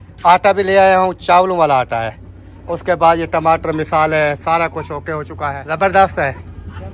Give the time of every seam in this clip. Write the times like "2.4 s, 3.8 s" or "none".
5.6 s